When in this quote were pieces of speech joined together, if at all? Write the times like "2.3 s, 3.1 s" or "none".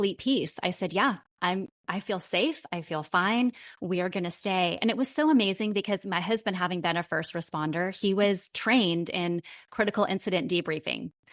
none